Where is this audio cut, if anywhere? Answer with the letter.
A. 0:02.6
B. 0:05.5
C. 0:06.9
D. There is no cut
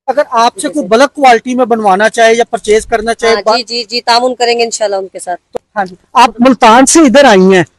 B